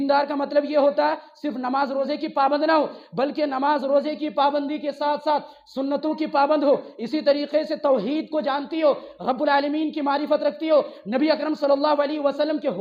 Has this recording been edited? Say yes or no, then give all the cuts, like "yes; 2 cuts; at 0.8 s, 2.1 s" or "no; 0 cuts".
no; 0 cuts